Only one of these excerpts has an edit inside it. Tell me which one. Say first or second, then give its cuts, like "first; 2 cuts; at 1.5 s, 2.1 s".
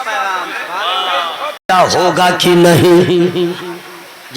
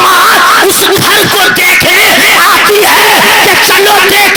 first; 1 cut; at 1.6 s